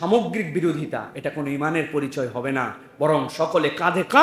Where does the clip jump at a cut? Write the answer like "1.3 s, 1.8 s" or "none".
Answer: none